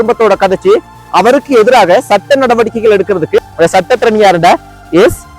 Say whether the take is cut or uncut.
cut